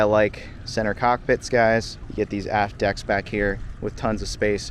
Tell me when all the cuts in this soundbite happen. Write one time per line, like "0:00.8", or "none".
0:02.0